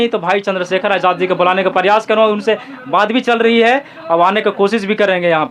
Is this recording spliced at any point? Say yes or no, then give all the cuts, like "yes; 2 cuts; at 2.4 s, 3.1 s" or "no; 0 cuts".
no; 0 cuts